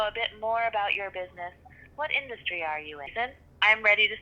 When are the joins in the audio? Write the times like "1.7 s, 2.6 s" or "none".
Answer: 3.1 s

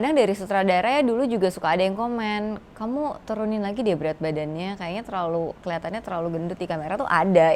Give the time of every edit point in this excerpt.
none

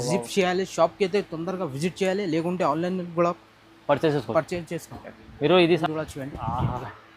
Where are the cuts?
5.8 s

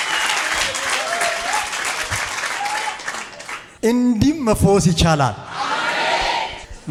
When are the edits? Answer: none

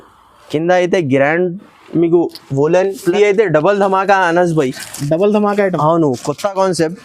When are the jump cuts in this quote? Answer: 3.1 s

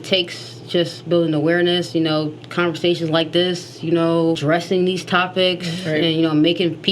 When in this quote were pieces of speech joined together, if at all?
4.4 s

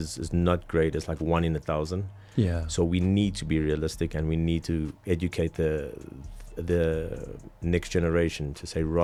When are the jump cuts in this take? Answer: none

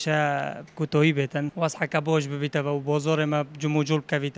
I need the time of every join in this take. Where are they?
1.5 s

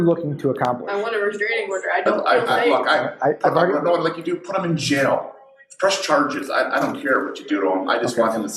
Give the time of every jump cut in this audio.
6.7 s

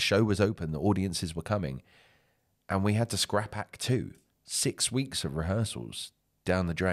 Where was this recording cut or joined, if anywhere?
none

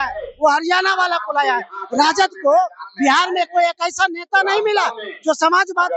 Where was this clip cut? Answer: none

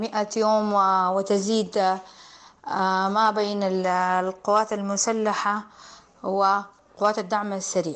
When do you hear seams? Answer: 6.8 s

